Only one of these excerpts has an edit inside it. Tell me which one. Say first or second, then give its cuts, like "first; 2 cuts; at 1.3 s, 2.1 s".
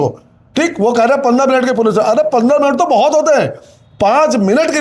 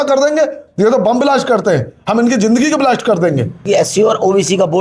second; 1 cut; at 3.7 s